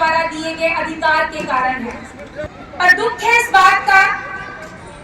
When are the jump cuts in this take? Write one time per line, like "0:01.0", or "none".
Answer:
0:02.5

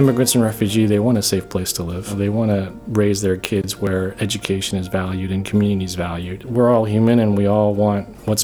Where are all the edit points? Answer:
0:02.1
0:06.4

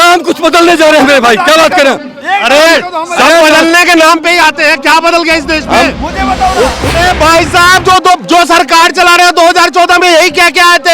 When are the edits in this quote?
0:07.0

